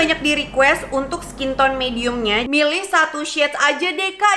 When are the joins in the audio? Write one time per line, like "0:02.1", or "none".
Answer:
0:02.4